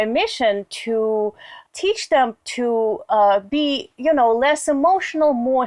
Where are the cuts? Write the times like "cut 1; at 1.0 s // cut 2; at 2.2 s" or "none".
cut 1; at 1.5 s